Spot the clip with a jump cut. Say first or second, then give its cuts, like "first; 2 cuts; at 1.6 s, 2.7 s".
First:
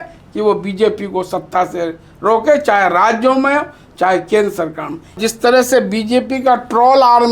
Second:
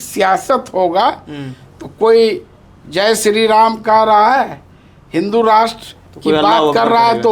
first; 1 cut; at 5.1 s